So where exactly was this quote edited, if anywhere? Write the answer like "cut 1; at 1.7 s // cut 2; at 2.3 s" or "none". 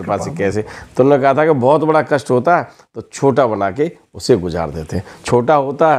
none